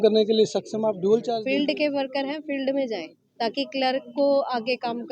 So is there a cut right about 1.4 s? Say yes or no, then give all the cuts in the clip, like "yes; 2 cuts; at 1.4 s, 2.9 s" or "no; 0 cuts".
yes; 1 cut; at 1.4 s